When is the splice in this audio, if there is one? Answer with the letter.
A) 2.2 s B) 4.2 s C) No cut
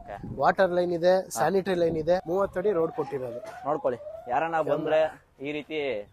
A